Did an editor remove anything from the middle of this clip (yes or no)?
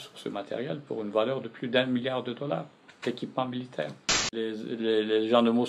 yes